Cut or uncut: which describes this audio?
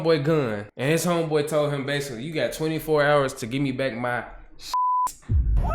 uncut